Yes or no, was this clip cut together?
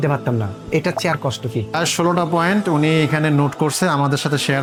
no